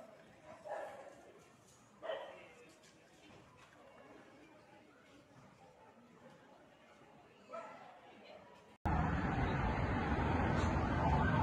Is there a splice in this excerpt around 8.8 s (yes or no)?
yes